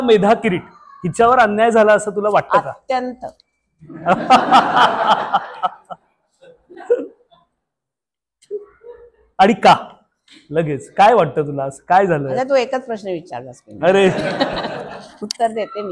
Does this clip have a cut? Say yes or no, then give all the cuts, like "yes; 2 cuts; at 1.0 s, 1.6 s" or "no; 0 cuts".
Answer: no; 0 cuts